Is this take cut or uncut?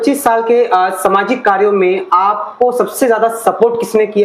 uncut